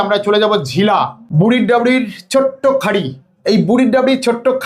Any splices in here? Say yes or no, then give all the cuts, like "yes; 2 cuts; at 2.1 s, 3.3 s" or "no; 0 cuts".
yes; 1 cut; at 1.2 s